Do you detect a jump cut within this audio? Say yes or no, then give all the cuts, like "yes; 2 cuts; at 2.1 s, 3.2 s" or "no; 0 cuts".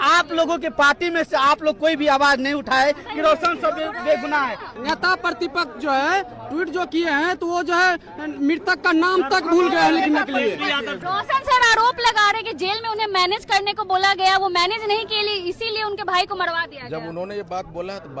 yes; 2 cuts; at 4.7 s, 10.9 s